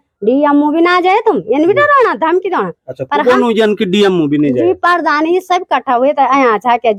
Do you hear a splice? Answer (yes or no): no